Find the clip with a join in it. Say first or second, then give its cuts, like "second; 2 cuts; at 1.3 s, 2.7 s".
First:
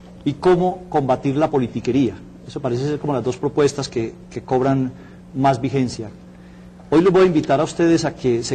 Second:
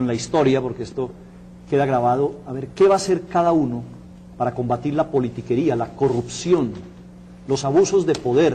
first; 1 cut; at 6.2 s